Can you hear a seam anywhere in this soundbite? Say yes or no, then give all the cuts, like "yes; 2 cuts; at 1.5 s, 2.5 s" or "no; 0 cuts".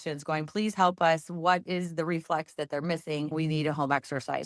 yes; 1 cut; at 3.3 s